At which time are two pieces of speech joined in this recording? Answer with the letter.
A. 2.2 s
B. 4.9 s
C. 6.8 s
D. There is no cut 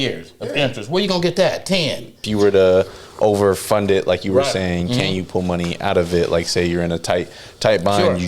A